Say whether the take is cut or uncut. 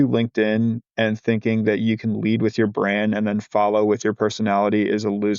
uncut